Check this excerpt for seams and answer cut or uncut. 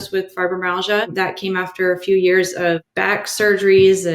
cut